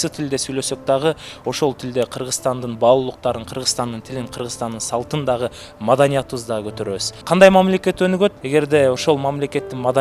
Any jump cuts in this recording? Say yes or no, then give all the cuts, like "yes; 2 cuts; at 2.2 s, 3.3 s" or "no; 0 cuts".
yes; 2 cuts; at 7.1 s, 8.4 s